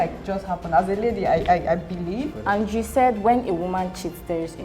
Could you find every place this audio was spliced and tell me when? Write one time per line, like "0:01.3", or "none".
0:02.3